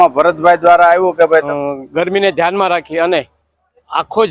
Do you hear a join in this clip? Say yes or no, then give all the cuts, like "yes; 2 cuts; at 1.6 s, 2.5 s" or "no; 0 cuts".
yes; 1 cut; at 1.5 s